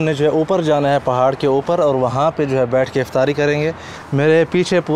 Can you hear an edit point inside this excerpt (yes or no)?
yes